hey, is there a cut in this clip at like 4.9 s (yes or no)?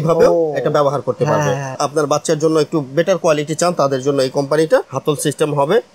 yes